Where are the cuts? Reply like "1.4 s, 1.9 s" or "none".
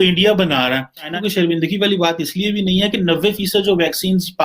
1.1 s